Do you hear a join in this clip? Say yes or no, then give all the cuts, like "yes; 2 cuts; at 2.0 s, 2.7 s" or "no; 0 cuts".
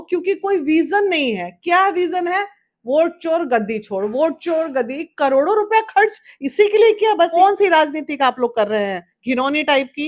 yes; 1 cut; at 7.3 s